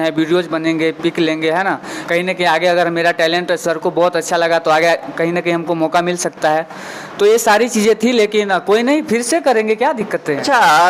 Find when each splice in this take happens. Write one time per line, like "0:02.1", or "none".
none